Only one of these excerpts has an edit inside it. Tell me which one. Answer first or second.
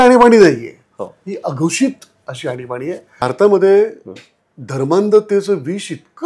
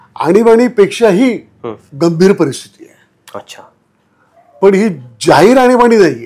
first